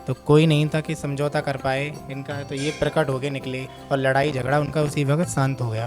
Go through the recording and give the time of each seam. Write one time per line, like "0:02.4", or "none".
0:03.7